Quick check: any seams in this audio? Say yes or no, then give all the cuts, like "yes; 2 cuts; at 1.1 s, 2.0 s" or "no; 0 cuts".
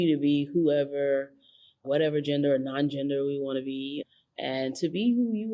no; 0 cuts